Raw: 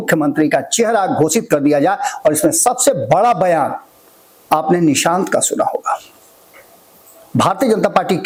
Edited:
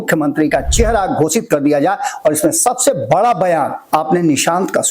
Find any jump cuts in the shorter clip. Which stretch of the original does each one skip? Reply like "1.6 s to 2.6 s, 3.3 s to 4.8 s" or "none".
3.8 s to 4.4 s